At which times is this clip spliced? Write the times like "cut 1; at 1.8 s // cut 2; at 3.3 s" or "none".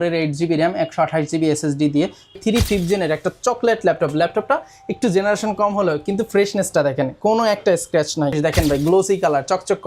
cut 1; at 2.4 s // cut 2; at 8.4 s